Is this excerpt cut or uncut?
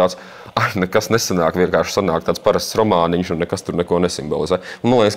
uncut